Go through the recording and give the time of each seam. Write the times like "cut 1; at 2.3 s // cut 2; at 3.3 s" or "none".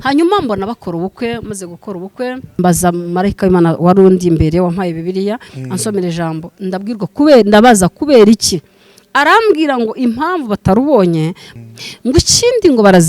cut 1; at 2.6 s // cut 2; at 11.4 s